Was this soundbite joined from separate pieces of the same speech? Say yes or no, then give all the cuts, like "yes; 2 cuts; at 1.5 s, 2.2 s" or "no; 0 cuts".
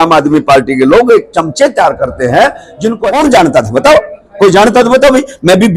yes; 1 cut; at 3.1 s